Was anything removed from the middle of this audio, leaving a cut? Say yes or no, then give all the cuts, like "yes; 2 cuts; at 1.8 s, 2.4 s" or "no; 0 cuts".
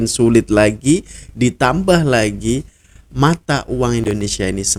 no; 0 cuts